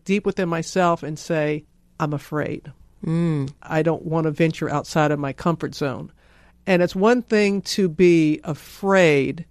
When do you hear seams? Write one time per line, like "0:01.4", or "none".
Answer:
0:01.8